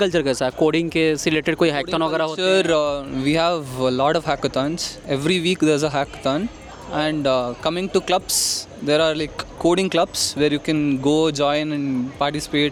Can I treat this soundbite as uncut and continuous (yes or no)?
yes